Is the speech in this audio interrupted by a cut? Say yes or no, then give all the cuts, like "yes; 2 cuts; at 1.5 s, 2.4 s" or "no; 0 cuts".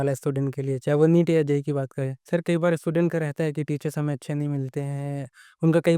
yes; 1 cut; at 1.9 s